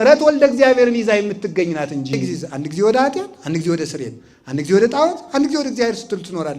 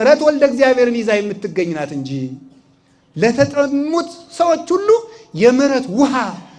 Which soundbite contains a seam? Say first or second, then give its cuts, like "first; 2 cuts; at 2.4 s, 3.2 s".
first; 1 cut; at 2.4 s